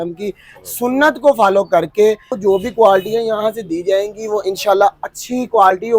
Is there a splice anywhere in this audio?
yes; 1 cut; at 2.3 s

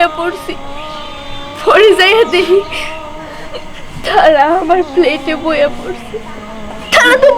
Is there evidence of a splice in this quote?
no; 0 cuts

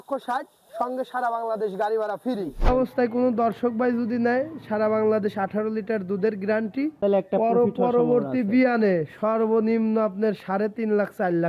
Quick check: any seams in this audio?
yes; 2 cuts; at 2.7 s, 6.9 s

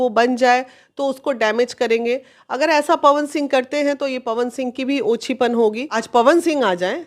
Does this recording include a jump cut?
yes; 1 cut; at 5.9 s

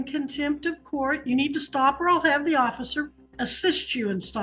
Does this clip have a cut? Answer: yes; 1 cut; at 3.2 s

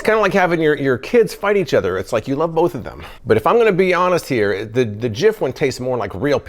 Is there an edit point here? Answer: no; 0 cuts

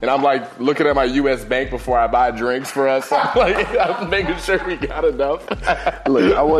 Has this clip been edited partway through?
no; 0 cuts

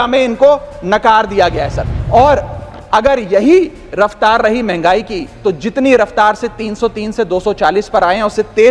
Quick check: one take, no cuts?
no; 1 cut; at 1.9 s

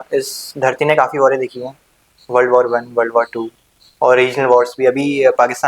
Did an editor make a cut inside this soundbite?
no; 0 cuts

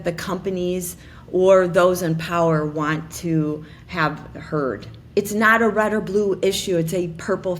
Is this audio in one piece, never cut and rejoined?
no; 1 cut; at 4.9 s

